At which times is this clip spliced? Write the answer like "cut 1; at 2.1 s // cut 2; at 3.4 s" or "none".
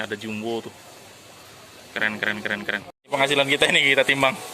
cut 1; at 3.0 s